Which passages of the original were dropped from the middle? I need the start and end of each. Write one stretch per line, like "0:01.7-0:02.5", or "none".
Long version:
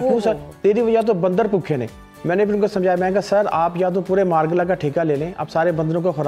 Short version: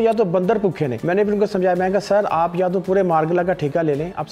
0:01.9-0:02.2